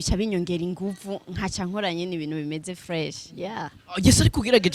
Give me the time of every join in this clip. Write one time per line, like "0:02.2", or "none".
none